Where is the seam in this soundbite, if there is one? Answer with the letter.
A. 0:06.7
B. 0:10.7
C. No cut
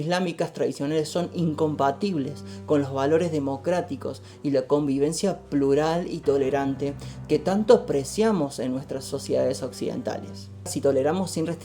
B